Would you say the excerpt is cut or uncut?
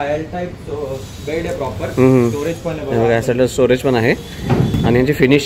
uncut